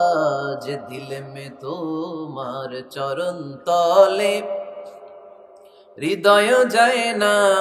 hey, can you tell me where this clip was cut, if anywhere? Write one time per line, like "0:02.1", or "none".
none